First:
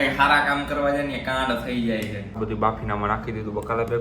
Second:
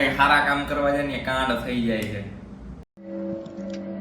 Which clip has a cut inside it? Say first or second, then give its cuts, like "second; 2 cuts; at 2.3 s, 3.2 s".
first; 1 cut; at 2.3 s